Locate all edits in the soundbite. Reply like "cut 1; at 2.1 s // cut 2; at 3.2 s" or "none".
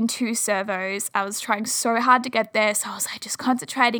none